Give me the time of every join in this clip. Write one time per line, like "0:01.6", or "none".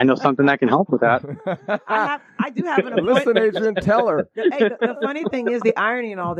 none